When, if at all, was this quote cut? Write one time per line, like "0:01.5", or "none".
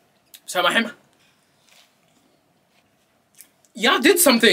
0:01.2
0:02.8